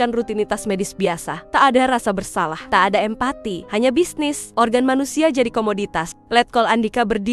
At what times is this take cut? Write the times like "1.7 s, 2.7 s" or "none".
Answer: 1.3 s, 2.6 s, 3.5 s, 4.4 s